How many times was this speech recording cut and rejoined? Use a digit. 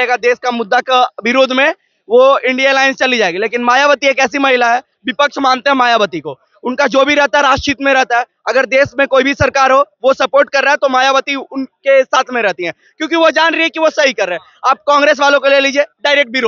0